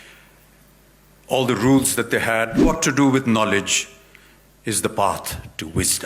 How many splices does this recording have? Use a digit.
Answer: 1